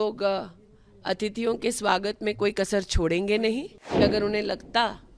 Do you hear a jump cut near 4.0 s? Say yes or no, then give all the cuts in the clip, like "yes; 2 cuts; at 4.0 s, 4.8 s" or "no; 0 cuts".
yes; 1 cut; at 4.0 s